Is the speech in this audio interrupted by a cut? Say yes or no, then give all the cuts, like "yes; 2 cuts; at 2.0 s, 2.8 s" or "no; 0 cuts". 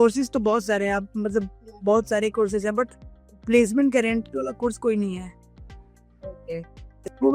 no; 0 cuts